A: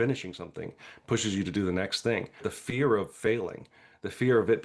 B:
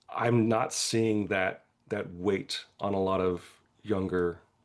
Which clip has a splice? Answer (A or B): A